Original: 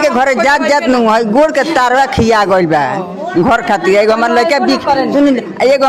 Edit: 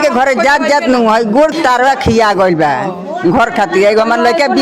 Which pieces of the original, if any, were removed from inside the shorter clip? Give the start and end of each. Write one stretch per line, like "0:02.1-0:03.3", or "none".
0:01.5-0:01.6